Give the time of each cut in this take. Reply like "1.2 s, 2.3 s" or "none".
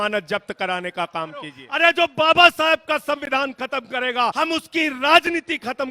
1.6 s, 4.3 s